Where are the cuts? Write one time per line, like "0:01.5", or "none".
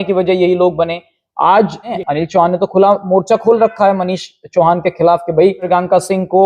0:01.9
0:05.7